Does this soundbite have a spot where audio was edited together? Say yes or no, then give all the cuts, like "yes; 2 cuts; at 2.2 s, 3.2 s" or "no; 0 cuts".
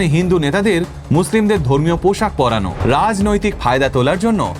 yes; 1 cut; at 2.7 s